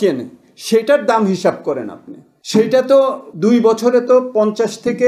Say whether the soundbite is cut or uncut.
cut